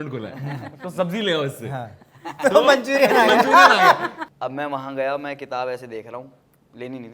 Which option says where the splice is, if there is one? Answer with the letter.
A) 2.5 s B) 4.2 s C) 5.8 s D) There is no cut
B